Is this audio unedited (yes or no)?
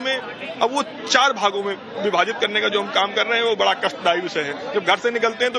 no